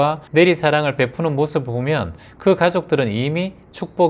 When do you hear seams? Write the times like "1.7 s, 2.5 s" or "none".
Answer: none